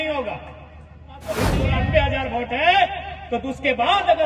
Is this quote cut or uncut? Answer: cut